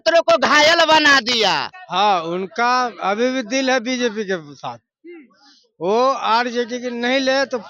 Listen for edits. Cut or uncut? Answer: cut